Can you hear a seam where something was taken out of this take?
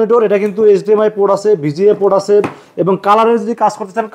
no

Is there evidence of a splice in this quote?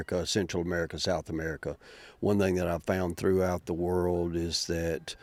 no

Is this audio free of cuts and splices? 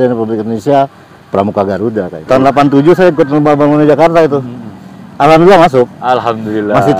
no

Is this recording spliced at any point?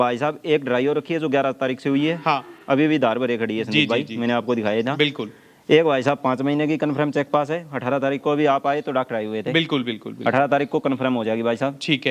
no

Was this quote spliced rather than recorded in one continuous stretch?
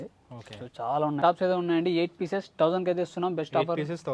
yes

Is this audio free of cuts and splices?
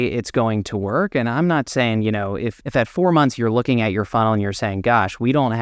no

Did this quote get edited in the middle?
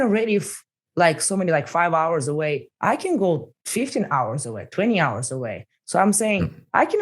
yes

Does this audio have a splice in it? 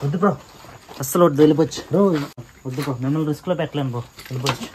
yes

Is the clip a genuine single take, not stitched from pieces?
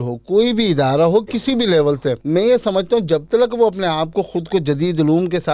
no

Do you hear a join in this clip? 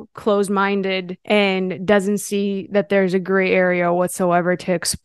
yes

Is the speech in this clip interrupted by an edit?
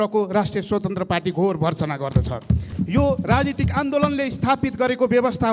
yes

